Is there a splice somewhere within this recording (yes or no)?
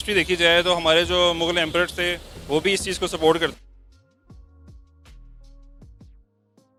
no